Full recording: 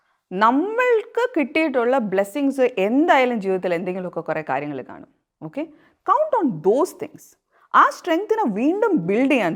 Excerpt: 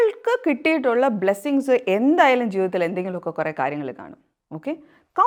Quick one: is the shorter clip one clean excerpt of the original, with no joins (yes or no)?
yes